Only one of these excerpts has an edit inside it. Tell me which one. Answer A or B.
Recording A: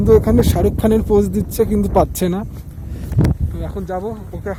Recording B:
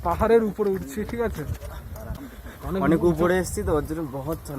B